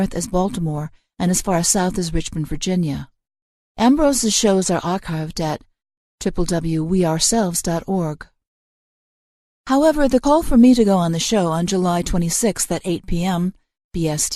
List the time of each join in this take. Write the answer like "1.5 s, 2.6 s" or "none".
4.4 s